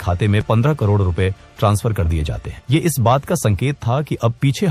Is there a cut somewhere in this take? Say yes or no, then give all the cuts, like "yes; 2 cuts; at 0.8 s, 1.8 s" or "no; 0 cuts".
no; 0 cuts